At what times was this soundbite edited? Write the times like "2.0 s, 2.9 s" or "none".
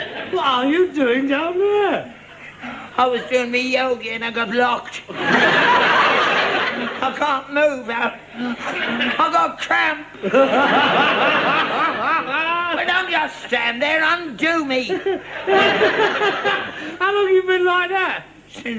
14.2 s